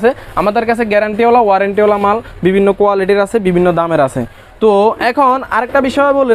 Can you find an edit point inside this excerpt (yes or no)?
no